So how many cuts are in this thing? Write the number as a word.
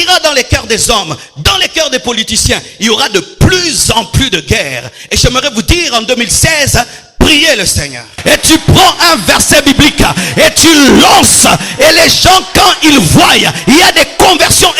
one